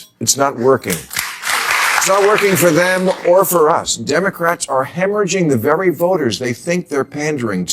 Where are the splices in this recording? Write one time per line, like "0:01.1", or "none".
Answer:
0:01.5